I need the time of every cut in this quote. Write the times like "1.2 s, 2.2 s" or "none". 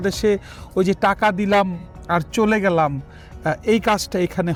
none